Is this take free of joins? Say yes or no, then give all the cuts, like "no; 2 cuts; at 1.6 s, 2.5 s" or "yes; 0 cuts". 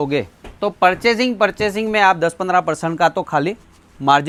yes; 0 cuts